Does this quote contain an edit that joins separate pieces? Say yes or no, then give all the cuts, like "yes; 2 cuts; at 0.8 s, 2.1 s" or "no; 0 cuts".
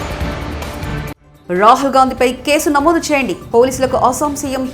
no; 0 cuts